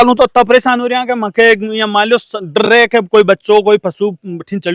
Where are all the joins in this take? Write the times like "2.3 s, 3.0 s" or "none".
none